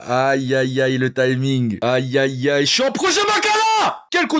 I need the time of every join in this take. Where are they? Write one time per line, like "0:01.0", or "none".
none